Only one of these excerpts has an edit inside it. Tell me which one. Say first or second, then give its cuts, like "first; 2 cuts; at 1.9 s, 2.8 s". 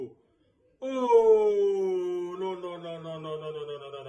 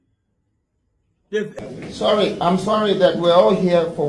second; 1 cut; at 1.5 s